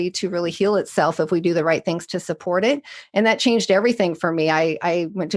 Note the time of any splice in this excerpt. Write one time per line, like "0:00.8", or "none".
none